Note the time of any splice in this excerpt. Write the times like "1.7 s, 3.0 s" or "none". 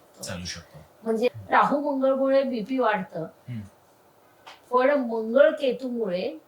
1.3 s